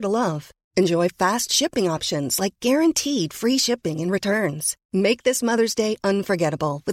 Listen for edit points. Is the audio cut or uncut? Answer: uncut